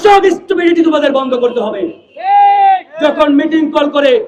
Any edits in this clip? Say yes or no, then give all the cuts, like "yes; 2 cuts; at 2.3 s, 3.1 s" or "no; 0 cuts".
no; 0 cuts